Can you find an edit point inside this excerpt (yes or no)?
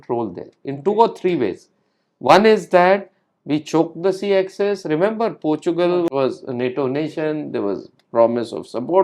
yes